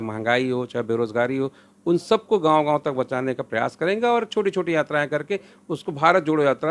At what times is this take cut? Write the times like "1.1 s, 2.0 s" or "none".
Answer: none